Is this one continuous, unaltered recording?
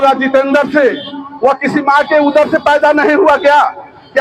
no; 1 cut; at 1.2 s

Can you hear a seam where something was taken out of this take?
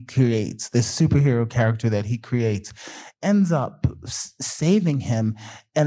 no; 0 cuts

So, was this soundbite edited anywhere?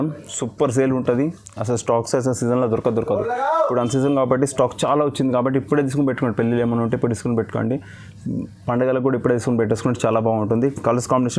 no; 0 cuts

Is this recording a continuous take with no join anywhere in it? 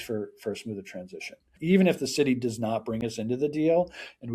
no; 1 cut; at 1.5 s

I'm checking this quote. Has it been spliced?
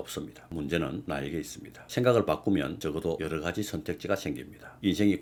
no; 0 cuts

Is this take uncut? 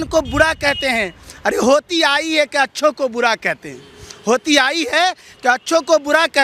yes; 0 cuts

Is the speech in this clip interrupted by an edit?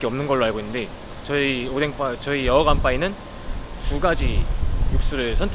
no; 0 cuts

